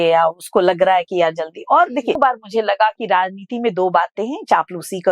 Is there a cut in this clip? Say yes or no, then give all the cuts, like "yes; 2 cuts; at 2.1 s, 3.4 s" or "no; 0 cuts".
yes; 1 cut; at 2.2 s